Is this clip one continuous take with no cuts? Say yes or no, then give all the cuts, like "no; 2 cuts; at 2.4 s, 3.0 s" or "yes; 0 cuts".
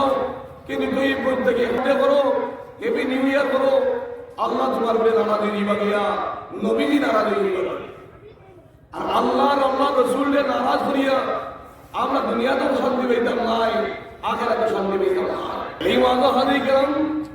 no; 2 cuts; at 1.8 s, 15.7 s